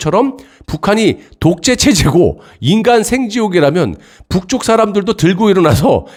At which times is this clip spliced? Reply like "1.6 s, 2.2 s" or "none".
none

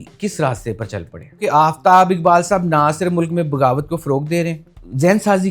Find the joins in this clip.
1.4 s

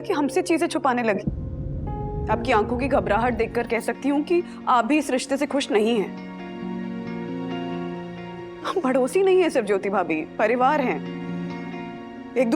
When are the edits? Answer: 2.2 s

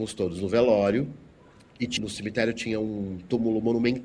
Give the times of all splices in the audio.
1.9 s

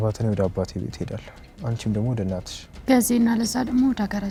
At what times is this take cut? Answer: none

